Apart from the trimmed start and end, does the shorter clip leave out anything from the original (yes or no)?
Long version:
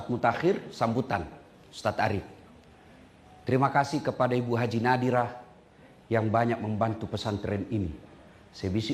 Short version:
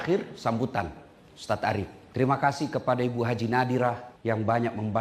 yes